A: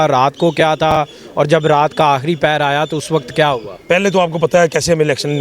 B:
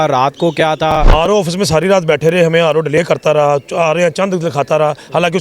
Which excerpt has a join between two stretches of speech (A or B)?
B